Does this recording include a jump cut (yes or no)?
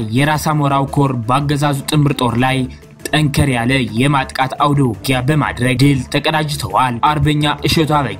yes